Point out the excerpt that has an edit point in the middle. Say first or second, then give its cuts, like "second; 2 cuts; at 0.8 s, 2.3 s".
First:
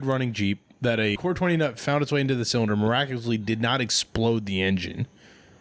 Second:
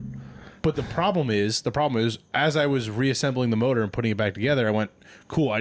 first; 1 cut; at 1.2 s